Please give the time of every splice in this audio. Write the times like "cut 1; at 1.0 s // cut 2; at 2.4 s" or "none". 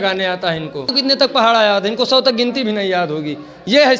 cut 1; at 0.9 s